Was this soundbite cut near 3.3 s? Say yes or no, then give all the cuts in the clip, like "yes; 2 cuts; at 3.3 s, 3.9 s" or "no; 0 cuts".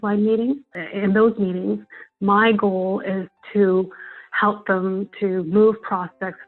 no; 0 cuts